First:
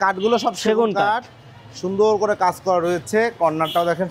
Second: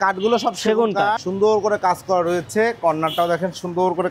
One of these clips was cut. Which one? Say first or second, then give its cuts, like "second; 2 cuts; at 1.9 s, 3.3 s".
second; 1 cut; at 1.3 s